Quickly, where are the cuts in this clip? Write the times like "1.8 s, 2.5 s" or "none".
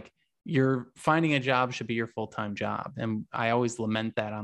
none

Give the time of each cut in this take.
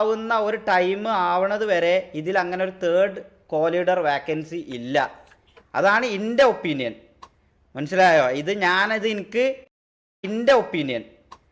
10.2 s

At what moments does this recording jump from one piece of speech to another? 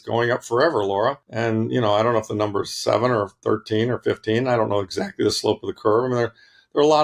1.3 s

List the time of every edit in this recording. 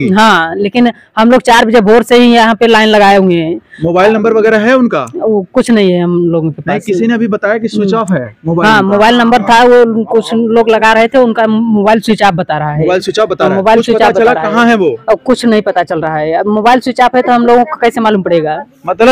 none

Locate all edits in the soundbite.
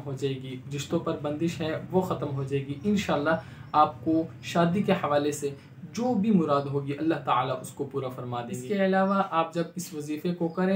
8.6 s

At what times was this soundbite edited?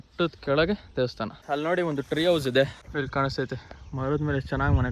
1.4 s, 2.8 s

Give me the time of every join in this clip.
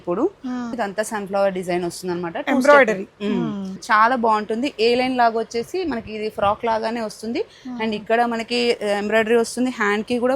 0.7 s, 3.7 s

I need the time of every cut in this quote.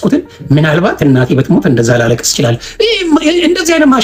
none

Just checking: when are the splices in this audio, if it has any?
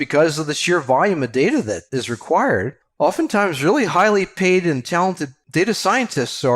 1.8 s, 2.8 s, 5.3 s

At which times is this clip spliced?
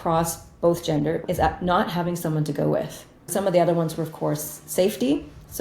1.2 s, 3.3 s

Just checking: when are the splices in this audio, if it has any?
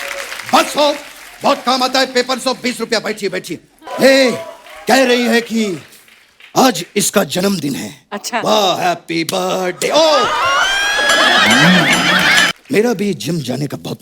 3.8 s, 12.5 s

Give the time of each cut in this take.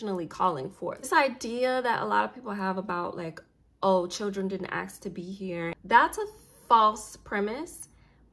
1.1 s, 5.8 s

